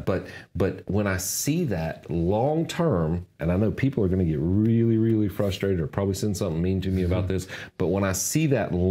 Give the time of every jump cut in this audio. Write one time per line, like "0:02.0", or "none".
none